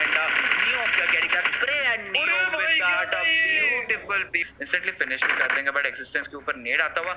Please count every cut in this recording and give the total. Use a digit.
1